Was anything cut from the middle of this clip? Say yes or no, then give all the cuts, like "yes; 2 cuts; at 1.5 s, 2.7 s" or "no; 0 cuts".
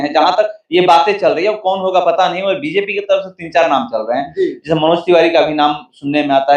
no; 0 cuts